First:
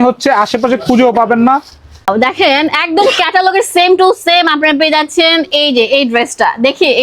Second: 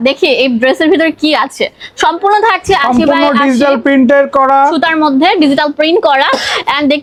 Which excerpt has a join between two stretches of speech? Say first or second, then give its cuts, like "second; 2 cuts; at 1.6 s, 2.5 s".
first; 1 cut; at 2.1 s